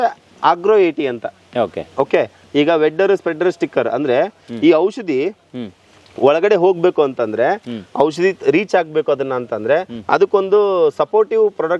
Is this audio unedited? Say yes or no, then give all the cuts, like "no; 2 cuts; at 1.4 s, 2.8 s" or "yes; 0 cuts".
yes; 0 cuts